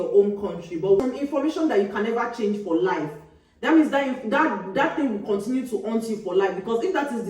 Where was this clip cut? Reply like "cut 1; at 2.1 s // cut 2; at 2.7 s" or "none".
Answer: cut 1; at 1.0 s